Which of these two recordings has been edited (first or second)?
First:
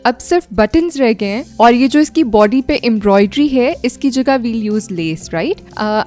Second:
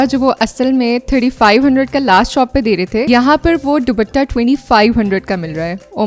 second